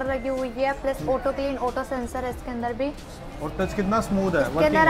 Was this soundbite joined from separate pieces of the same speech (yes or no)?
no